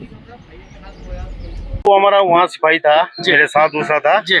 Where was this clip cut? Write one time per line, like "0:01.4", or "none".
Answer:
0:01.9

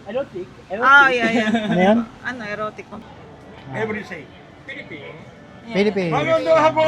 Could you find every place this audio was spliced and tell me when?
0:02.9

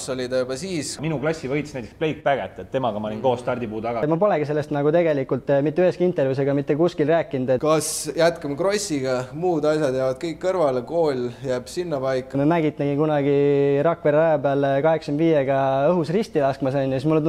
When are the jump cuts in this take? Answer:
0:01.0
0:04.0
0:07.6
0:12.4

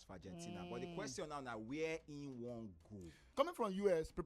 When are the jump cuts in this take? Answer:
0:03.2

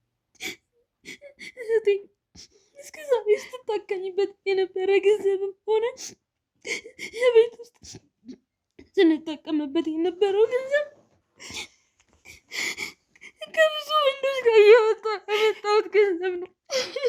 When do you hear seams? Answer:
none

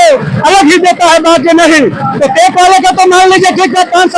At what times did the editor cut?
none

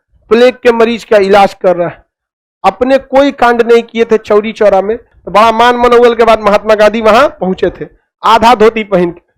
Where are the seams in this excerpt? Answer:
0:05.1

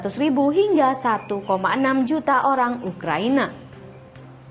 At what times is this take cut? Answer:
0:03.6

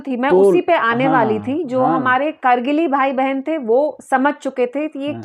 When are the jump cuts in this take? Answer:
none

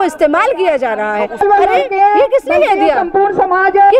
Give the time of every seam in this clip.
0:01.4

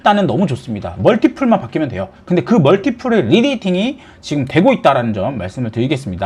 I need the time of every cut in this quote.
none

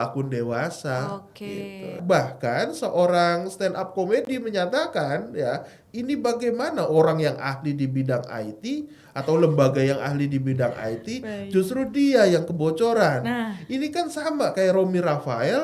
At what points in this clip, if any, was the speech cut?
0:02.0

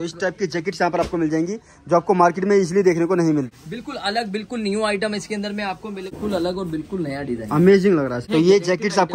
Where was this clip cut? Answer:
0:03.5
0:06.2
0:08.2

